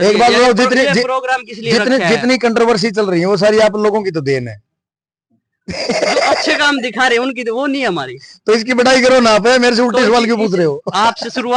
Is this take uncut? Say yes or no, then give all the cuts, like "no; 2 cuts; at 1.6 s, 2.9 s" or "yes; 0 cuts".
yes; 0 cuts